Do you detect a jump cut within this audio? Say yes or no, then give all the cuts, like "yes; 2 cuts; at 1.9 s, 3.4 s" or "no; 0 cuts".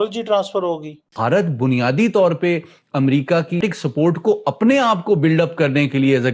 yes; 2 cuts; at 1.1 s, 3.6 s